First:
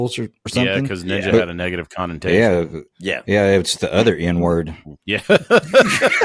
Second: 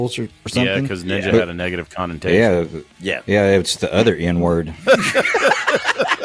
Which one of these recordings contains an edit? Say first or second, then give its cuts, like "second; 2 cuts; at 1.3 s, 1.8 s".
second; 1 cut; at 4.8 s